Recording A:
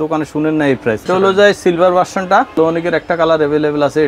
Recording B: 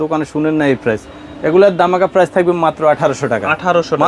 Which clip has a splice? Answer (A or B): A